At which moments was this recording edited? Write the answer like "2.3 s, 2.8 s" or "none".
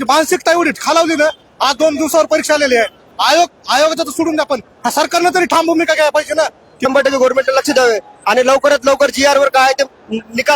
6.9 s

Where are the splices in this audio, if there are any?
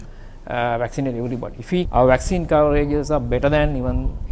1.9 s

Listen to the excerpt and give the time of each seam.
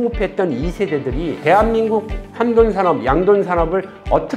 1.4 s

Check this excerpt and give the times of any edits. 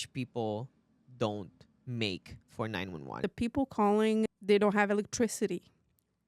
3.2 s

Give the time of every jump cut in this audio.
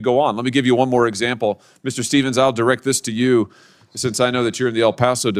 none

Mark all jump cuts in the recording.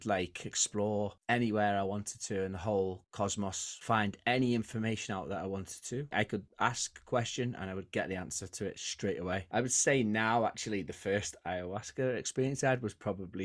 3.7 s, 6.1 s, 9.4 s

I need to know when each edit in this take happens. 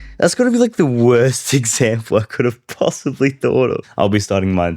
3.8 s

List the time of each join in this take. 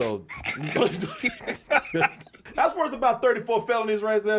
2.4 s

